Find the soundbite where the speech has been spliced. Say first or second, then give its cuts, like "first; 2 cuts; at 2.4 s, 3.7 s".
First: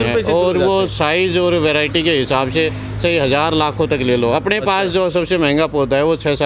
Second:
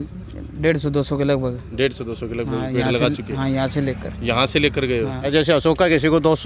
second; 1 cut; at 5.3 s